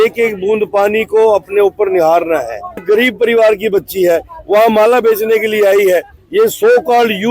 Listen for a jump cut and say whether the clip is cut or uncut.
cut